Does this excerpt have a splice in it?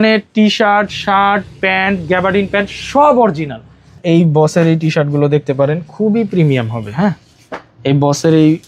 yes; 1 cut; at 4.0 s

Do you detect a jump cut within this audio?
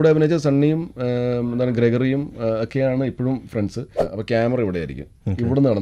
yes; 1 cut; at 3.9 s

